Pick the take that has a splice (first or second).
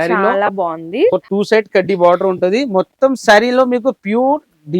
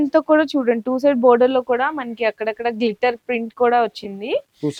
first